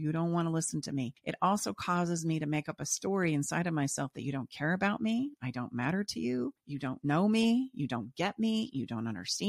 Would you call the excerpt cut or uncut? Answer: cut